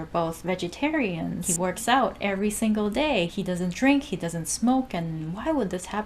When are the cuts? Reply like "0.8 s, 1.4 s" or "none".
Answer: 1.5 s, 3.3 s